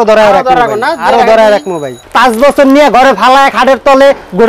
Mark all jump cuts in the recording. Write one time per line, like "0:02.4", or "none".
0:02.0